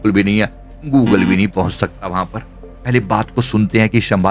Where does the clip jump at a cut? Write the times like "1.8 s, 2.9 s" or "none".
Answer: 2.7 s